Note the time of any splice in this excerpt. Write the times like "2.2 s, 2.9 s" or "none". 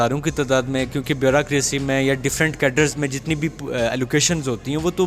none

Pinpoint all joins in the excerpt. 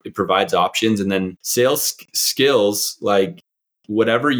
1.4 s

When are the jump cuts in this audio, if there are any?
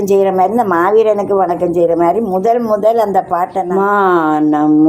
3.7 s

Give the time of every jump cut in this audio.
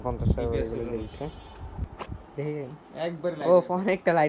1.8 s

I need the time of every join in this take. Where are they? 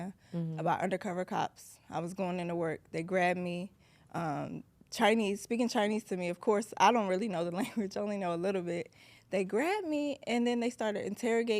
none

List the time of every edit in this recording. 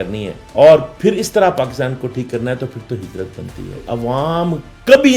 3.8 s

